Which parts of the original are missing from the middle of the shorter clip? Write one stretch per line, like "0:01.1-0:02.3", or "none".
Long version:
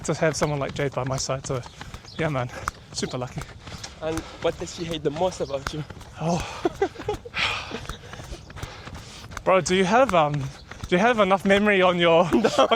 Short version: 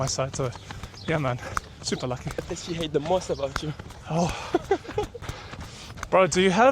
0:03.6-0:04.6
0:07.3-0:08.5